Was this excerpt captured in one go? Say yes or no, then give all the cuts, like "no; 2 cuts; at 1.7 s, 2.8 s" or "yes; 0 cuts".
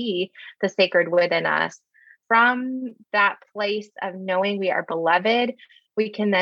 no; 1 cut; at 2.1 s